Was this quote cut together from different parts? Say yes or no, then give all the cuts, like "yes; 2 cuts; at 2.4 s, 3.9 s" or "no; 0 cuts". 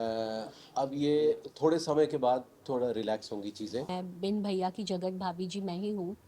yes; 1 cut; at 3.9 s